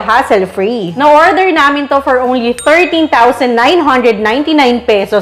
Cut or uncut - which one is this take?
uncut